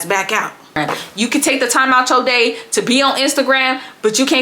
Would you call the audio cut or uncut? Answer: cut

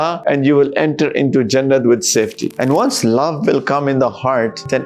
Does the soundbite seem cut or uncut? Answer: cut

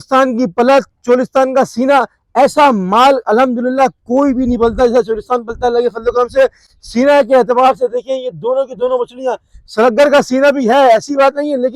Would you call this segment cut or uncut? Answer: uncut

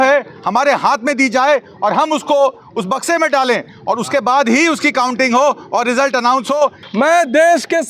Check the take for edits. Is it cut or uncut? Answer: cut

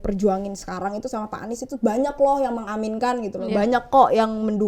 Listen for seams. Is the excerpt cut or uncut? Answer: uncut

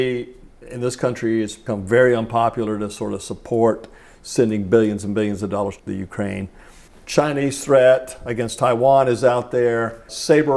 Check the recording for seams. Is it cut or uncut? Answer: cut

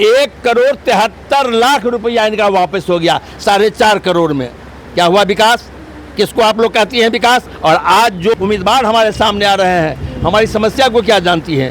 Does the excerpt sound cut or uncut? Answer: cut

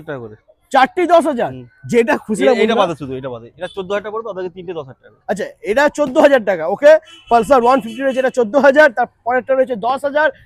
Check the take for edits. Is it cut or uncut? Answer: uncut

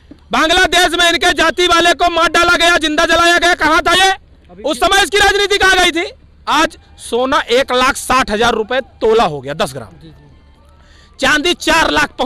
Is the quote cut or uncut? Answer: cut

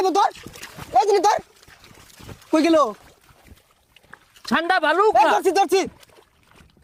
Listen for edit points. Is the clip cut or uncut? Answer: uncut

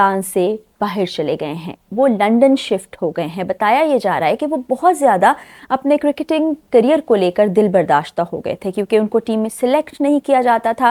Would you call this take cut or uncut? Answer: uncut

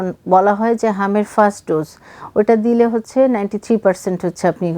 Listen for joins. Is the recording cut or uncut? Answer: uncut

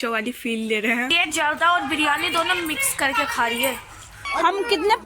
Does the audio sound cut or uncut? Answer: cut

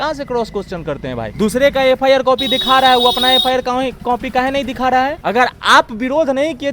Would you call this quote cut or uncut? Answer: cut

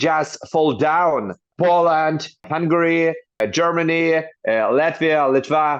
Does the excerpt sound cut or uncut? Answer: cut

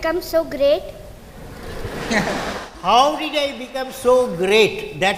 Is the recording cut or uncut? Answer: uncut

